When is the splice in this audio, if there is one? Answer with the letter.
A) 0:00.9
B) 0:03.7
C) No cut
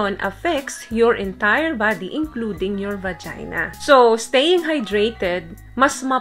B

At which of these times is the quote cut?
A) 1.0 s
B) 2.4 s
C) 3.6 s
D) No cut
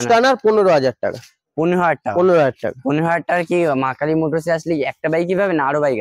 D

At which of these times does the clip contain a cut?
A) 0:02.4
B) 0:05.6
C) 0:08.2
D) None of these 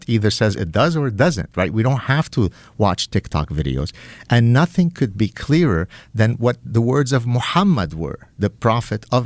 D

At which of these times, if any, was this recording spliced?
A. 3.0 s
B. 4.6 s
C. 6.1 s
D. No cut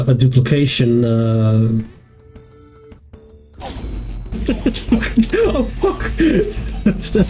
A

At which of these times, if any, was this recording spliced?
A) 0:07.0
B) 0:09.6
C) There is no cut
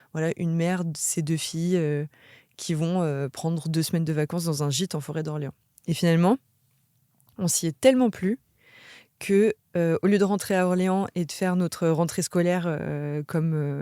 C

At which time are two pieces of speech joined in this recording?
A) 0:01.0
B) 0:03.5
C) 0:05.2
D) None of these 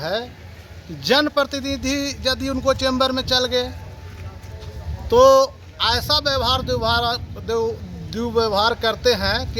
D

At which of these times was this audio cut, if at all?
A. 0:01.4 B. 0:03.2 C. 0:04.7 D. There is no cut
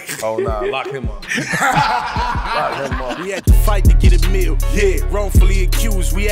B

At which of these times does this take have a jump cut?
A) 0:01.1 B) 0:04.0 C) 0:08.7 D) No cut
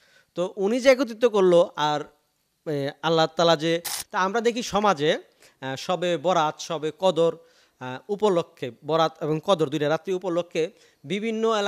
B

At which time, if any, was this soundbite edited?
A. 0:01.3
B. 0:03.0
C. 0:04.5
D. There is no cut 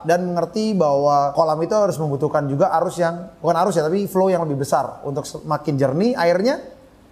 A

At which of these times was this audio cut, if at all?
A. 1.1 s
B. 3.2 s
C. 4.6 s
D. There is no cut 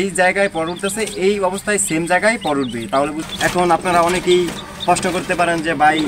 B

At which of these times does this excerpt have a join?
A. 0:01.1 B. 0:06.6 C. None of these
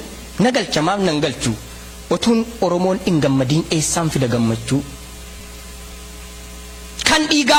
C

